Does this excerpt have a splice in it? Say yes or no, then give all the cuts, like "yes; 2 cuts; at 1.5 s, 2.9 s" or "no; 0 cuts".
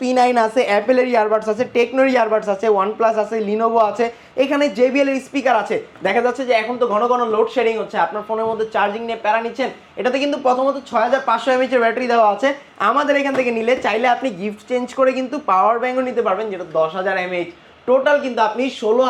no; 0 cuts